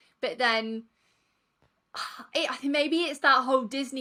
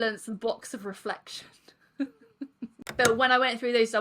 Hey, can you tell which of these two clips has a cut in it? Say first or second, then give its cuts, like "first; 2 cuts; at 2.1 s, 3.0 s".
second; 1 cut; at 2.8 s